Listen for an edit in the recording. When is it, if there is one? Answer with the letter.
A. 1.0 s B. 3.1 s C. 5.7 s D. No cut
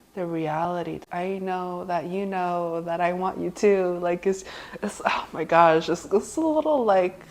A